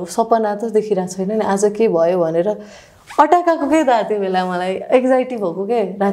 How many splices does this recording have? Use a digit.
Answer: 0